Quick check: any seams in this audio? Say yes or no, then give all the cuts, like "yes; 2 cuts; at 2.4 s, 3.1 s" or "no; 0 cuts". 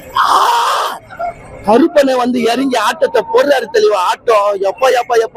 no; 0 cuts